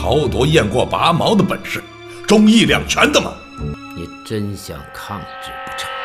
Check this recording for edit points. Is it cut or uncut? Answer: cut